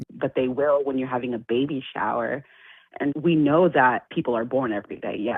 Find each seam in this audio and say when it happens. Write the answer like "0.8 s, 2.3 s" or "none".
3.1 s, 4.1 s